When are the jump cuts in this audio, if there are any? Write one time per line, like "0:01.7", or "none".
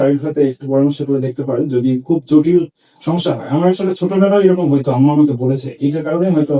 none